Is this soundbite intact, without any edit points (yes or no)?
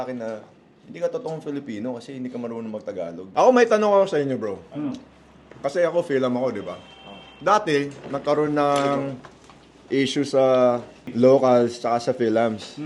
no